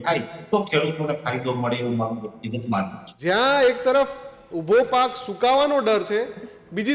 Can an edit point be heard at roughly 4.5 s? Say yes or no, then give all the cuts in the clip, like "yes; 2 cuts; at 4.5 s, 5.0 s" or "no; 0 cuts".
no; 1 cut; at 3.0 s